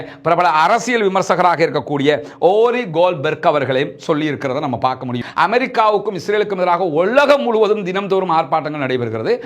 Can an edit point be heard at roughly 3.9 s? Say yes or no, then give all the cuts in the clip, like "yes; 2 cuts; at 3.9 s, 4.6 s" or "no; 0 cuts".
no; 1 cut; at 5.1 s